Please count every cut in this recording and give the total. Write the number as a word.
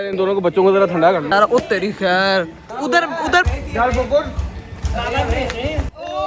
two